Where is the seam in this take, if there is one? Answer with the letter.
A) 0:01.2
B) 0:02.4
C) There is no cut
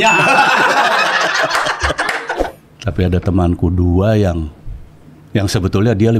B